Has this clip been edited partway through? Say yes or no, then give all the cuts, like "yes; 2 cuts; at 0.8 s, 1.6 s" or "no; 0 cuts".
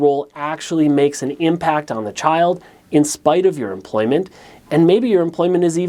no; 0 cuts